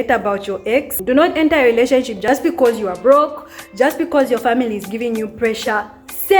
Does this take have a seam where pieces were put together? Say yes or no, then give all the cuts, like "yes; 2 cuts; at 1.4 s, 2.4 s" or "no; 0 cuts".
yes; 2 cuts; at 0.9 s, 2.2 s